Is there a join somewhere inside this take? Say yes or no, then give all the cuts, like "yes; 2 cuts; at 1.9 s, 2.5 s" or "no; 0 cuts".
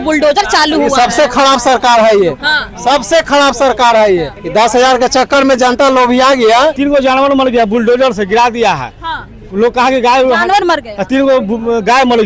yes; 2 cuts; at 4.4 s, 6.8 s